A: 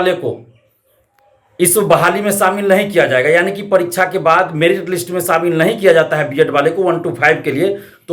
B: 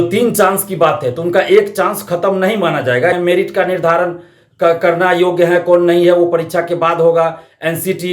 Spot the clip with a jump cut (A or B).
B